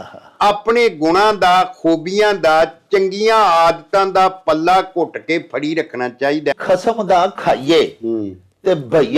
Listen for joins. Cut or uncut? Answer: cut